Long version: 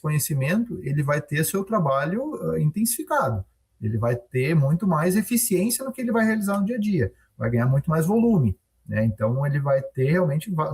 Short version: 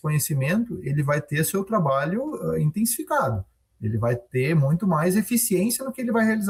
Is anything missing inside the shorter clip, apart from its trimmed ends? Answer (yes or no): no